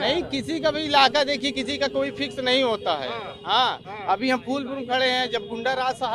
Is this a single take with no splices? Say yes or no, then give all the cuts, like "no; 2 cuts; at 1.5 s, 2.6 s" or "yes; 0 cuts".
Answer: yes; 0 cuts